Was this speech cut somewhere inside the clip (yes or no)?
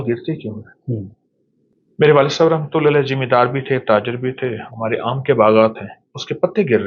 yes